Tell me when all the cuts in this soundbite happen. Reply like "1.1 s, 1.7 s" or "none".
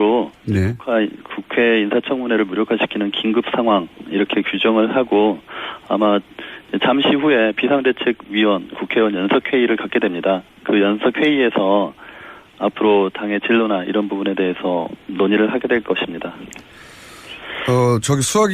8.4 s